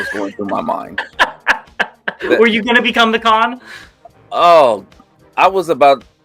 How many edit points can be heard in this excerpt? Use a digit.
0